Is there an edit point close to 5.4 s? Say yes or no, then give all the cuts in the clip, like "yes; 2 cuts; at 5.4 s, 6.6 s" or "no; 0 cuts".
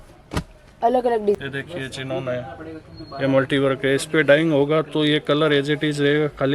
no; 1 cut; at 1.4 s